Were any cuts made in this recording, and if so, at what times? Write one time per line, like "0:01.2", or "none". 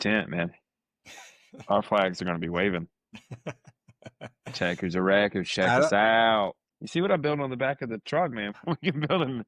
0:06.6
0:08.5